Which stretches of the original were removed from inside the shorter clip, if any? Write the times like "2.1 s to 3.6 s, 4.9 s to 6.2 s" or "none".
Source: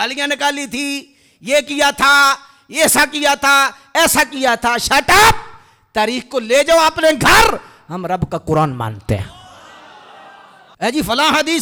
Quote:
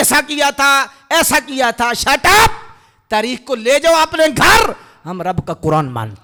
none